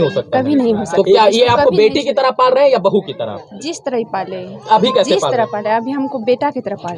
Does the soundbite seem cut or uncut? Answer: uncut